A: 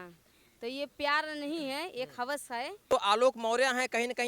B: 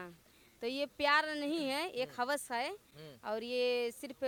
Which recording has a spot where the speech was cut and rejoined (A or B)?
A